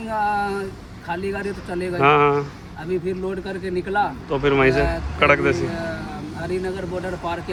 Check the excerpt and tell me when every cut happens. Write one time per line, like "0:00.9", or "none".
none